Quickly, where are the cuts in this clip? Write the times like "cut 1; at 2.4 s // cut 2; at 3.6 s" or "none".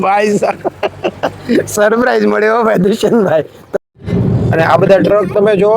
cut 1; at 3.5 s